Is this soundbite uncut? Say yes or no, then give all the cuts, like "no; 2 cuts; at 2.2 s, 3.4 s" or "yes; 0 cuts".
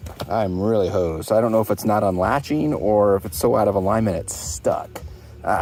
yes; 0 cuts